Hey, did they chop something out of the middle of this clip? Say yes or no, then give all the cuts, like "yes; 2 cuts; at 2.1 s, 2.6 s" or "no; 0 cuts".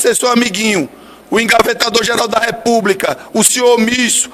no; 0 cuts